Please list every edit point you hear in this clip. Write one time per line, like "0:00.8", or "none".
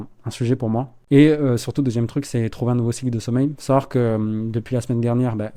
none